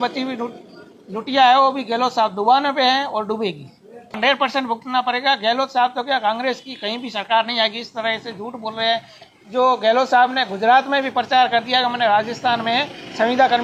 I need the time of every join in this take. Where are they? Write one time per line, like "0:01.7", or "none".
0:04.2

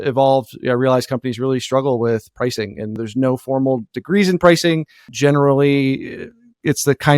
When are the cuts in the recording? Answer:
0:02.9

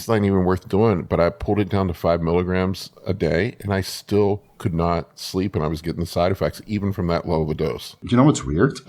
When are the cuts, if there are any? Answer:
0:08.0

